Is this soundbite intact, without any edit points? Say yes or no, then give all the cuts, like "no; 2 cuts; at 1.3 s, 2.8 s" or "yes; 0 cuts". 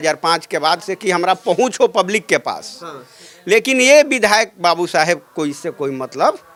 yes; 0 cuts